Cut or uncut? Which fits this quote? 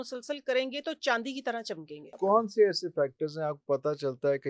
cut